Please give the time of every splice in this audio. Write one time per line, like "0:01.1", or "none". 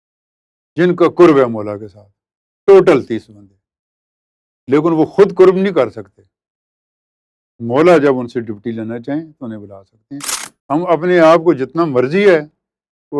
0:10.4